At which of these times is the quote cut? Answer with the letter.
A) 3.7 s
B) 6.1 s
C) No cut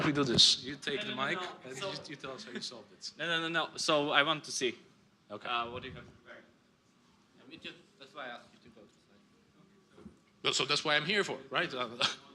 A